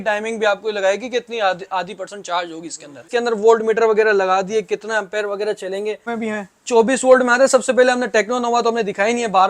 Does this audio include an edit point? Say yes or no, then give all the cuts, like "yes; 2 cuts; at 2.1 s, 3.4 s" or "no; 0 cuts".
yes; 2 cuts; at 3.1 s, 6.1 s